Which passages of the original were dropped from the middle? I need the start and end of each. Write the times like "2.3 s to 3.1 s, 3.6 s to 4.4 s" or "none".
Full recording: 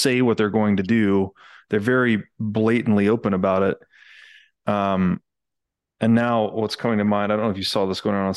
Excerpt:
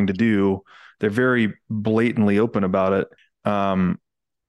3.9 s to 4.5 s